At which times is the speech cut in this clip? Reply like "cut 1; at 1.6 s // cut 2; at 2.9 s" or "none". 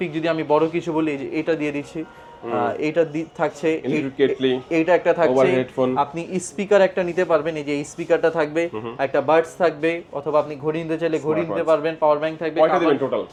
none